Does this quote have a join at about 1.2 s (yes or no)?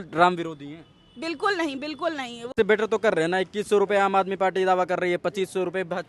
no